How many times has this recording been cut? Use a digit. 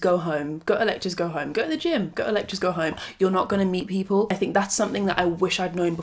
1